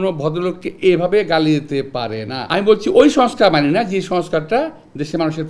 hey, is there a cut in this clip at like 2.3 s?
yes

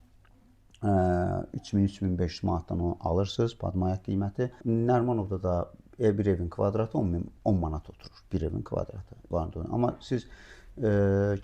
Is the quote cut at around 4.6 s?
yes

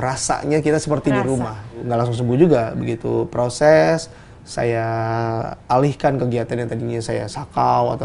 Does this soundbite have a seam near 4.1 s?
no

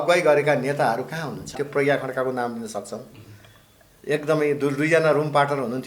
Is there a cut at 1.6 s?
yes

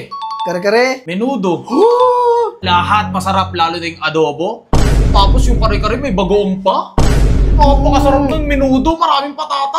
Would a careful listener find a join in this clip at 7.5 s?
no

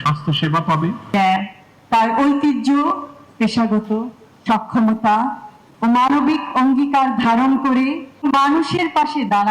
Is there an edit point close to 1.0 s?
yes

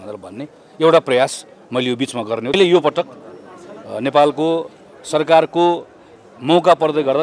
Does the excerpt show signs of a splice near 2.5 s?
yes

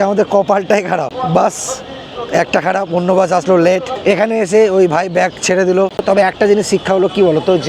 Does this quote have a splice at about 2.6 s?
no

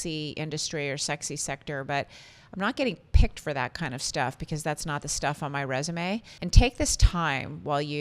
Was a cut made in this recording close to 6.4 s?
yes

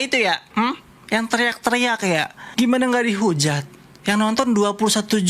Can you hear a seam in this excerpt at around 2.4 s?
yes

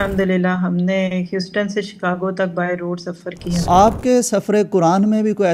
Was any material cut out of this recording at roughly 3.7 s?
yes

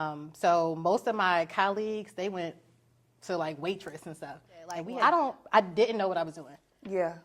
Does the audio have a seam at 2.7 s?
no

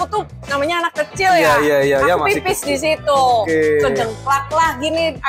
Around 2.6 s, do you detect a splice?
no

